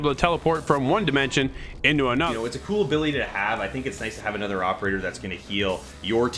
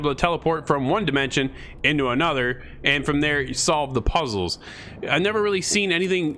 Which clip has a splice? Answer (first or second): first